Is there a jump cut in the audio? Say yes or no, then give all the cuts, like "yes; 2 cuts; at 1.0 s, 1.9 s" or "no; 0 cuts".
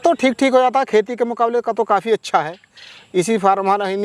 no; 0 cuts